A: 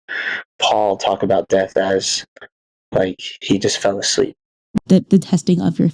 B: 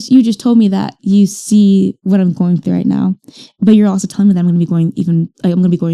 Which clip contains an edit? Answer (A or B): A